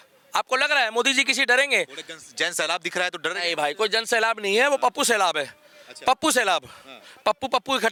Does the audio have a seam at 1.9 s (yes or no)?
no